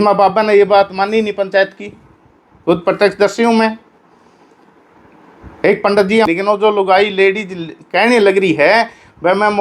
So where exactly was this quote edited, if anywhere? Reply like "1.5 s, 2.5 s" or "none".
6.3 s